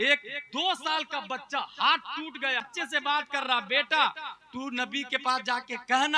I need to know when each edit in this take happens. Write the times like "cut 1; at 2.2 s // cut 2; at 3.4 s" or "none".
cut 1; at 2.7 s